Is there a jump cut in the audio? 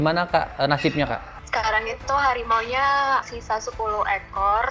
no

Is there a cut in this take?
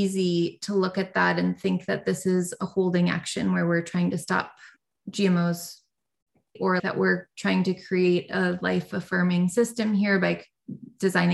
yes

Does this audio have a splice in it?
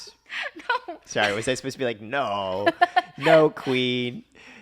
yes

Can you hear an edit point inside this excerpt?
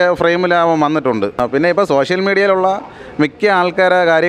no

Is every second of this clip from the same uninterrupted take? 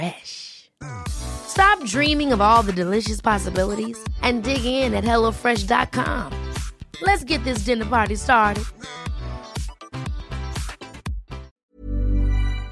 no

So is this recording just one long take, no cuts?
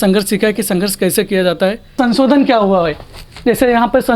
no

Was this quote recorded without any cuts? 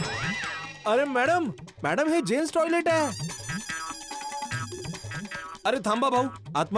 yes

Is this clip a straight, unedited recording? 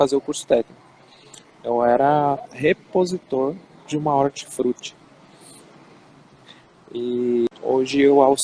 no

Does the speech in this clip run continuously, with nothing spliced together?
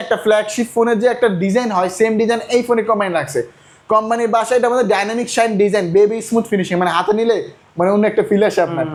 yes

